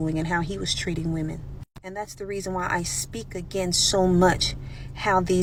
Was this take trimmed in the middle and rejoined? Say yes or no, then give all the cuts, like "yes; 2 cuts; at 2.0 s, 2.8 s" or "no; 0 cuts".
no; 0 cuts